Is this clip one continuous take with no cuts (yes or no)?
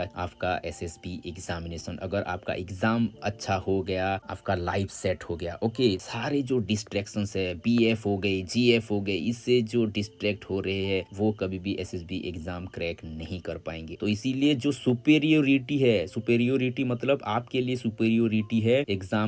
no